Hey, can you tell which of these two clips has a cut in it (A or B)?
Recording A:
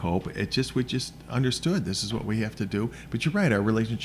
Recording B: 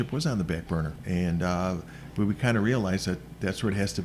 B